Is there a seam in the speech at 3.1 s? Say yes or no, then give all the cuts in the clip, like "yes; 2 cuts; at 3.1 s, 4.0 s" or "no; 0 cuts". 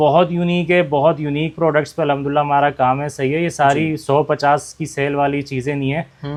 no; 0 cuts